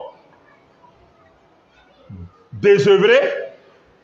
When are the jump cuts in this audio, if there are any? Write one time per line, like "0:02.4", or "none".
none